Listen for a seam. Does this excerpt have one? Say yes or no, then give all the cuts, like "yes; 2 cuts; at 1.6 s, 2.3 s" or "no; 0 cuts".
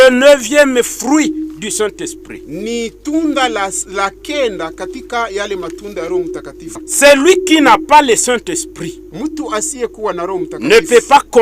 yes; 1 cut; at 6.7 s